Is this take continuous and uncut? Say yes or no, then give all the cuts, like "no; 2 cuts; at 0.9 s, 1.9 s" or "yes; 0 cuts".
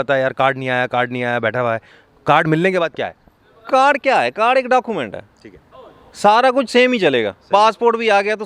yes; 0 cuts